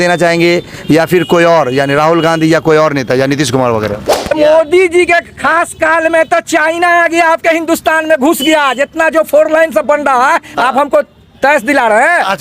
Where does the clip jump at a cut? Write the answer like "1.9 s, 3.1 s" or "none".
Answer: 4.4 s